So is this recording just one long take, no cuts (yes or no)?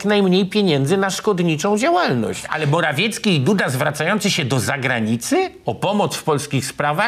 no